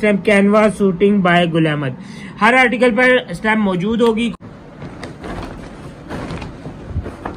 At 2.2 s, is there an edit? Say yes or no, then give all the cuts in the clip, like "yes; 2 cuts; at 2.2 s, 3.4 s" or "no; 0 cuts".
no; 1 cut; at 4.3 s